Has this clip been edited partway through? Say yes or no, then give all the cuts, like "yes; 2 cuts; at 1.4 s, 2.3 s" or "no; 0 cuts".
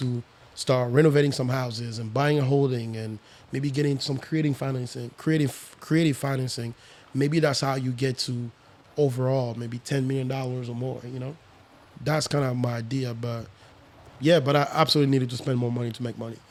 no; 0 cuts